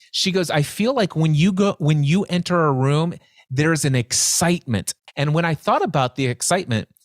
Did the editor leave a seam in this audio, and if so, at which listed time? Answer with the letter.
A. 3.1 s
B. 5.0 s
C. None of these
B